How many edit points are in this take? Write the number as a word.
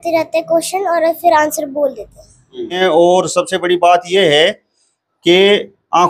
one